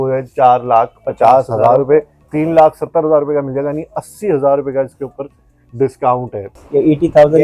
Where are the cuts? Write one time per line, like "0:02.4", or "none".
0:02.2
0:06.5